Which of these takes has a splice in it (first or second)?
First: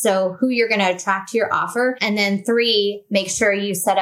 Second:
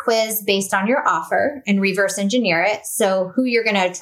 first